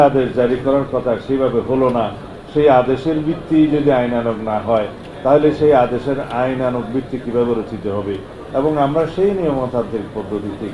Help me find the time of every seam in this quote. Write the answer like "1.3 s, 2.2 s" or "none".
8.3 s